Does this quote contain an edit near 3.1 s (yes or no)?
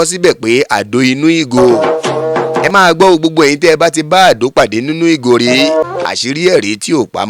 no